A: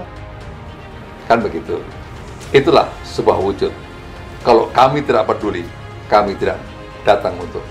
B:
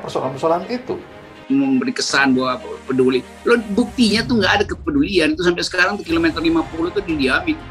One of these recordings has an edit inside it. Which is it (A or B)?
B